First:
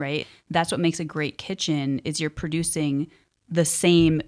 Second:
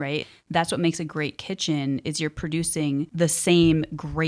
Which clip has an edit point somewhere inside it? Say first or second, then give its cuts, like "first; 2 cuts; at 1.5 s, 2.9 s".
second; 1 cut; at 3.1 s